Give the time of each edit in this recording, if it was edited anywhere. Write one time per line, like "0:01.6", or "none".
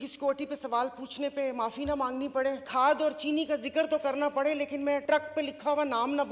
0:02.6
0:05.0

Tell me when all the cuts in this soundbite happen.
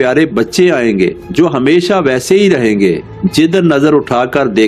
0:03.1

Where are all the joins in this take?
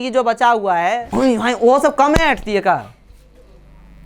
0:01.1

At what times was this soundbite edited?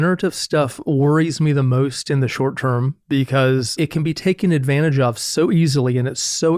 0:03.7

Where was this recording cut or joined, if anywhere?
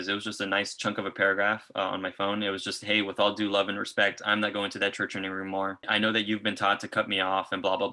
0:05.9

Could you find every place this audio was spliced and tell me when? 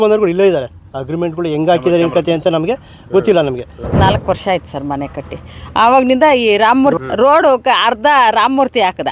0:03.8
0:07.0

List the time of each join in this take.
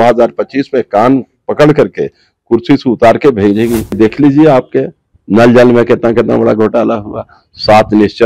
0:04.0

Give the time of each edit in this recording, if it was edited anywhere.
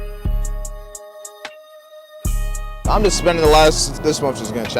0:02.7
0:03.9

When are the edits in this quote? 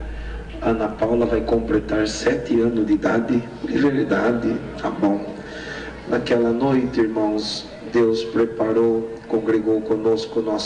none

